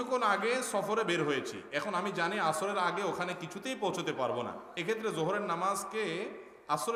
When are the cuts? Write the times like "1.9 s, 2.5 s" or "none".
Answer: none